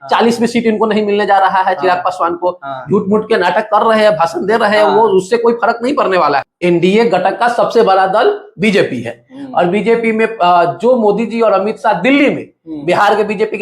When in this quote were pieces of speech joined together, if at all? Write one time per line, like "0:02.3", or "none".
0:06.5

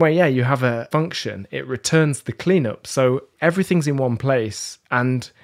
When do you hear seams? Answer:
0:00.8
0:03.3

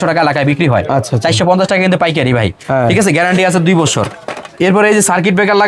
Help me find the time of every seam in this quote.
none

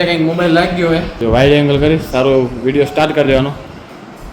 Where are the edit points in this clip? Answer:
0:01.1

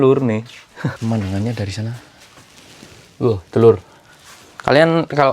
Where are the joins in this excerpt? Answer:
0:01.0

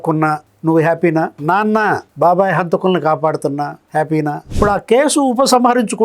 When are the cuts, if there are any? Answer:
0:04.5

